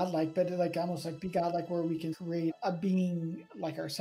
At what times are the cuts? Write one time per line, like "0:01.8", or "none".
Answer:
0:02.1